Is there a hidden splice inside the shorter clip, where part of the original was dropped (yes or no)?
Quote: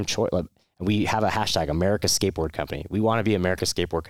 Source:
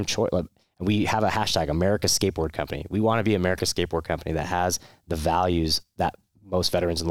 no